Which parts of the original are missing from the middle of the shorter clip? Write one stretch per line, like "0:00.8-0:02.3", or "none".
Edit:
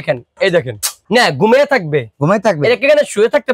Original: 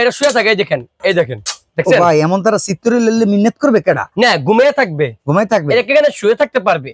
0:01.6-0:04.1